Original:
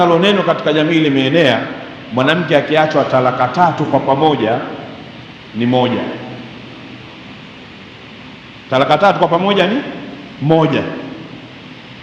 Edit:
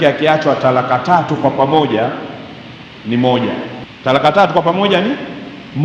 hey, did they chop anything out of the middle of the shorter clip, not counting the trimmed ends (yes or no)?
yes